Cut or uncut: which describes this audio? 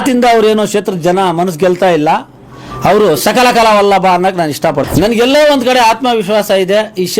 cut